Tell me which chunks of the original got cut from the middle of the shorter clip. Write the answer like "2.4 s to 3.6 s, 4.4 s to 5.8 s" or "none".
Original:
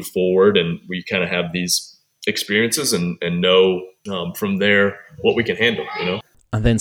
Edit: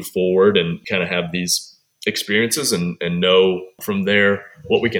0.8 s to 1.0 s, 4.0 s to 4.3 s